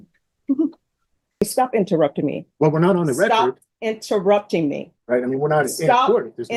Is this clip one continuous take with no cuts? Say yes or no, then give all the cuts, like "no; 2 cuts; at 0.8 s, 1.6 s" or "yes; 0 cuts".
no; 2 cuts; at 1.4 s, 4.9 s